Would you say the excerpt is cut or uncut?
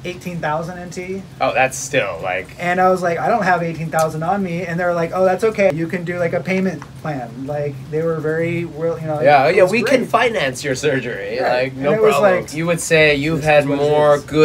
uncut